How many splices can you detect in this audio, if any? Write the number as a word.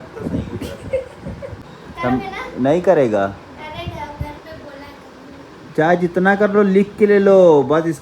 one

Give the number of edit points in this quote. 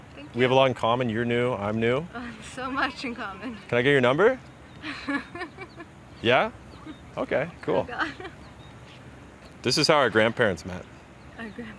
two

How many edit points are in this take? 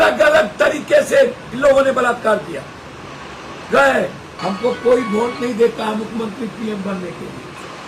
one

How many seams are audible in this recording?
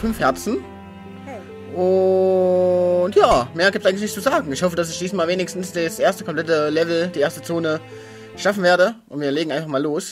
one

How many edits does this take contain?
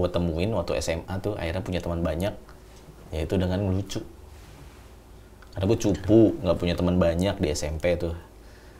zero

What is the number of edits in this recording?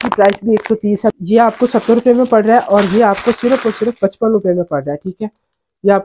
one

